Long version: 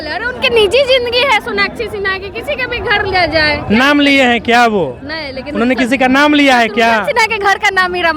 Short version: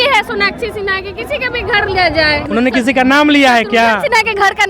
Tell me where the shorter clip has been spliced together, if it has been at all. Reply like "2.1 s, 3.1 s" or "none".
2.4 s